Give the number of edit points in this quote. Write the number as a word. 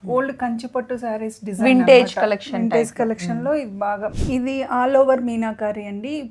one